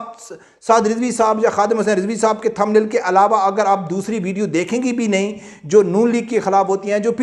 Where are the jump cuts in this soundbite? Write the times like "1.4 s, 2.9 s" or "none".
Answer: none